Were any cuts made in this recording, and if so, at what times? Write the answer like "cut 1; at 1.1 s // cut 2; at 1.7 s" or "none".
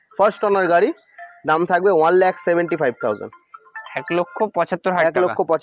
none

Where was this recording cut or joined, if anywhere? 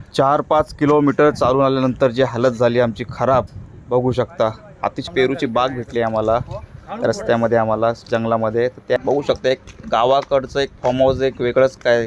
cut 1; at 5.0 s // cut 2; at 9.0 s

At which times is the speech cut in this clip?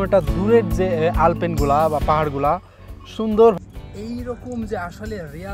cut 1; at 3.6 s

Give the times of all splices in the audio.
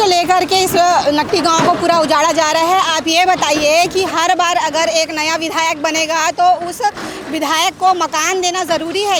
none

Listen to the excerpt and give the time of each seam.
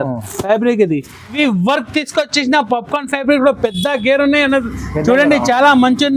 cut 1; at 1.3 s

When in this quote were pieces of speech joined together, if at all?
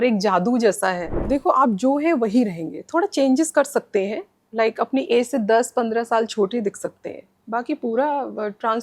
cut 1; at 1.2 s

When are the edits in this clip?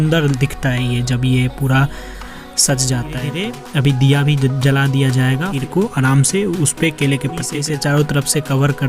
cut 1; at 3.4 s // cut 2; at 5.5 s // cut 3; at 7.5 s

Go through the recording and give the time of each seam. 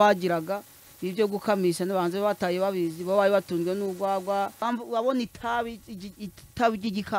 cut 1; at 4.6 s

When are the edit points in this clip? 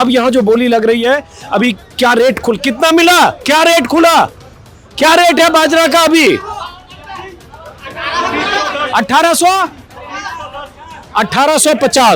none

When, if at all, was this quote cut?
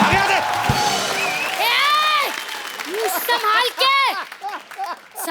none

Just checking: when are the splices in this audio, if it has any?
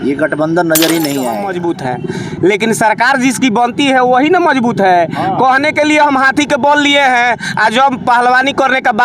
cut 1; at 1.5 s

